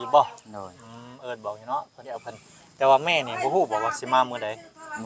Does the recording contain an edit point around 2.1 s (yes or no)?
yes